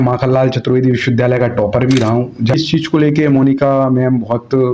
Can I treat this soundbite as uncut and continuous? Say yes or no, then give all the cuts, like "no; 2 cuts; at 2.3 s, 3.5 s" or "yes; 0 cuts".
no; 1 cut; at 2.5 s